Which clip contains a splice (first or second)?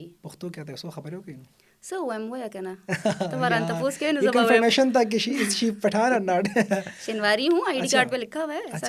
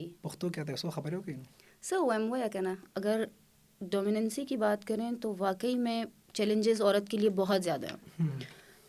second